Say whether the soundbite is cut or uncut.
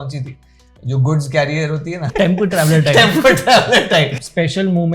cut